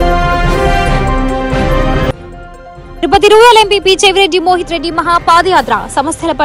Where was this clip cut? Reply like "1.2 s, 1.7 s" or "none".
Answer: 2.0 s